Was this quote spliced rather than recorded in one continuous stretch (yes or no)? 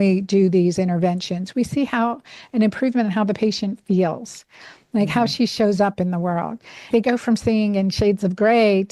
yes